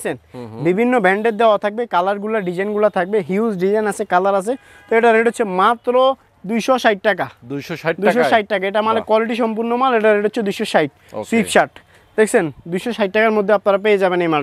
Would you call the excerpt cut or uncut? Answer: uncut